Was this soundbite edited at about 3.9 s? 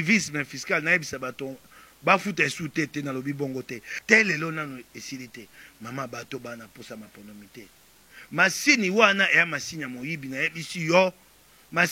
yes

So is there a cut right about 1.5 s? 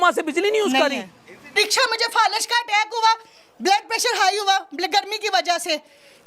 yes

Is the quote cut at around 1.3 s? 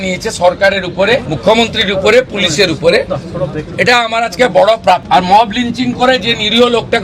yes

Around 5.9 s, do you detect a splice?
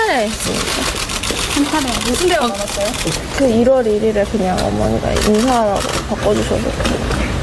yes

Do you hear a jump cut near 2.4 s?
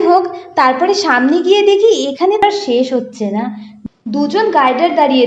yes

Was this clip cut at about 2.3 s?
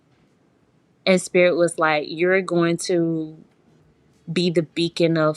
no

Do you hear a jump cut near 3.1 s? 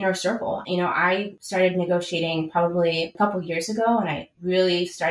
yes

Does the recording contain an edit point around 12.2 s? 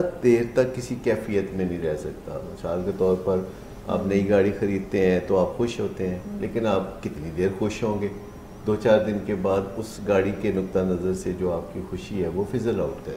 no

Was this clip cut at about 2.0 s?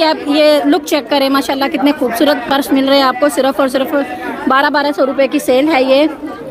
no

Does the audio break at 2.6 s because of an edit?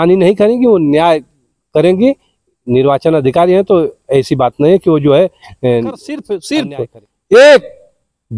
no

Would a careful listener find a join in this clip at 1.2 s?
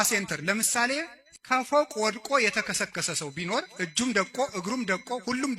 yes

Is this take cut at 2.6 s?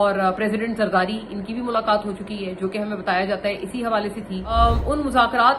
no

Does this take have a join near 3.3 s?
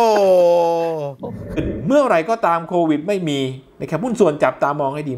no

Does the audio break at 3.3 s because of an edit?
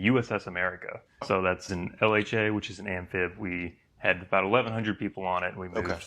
no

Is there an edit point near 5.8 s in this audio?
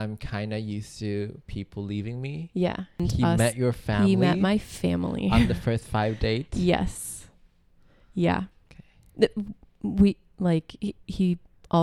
no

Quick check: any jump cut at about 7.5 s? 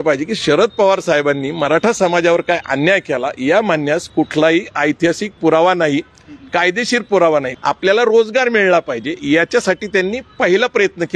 yes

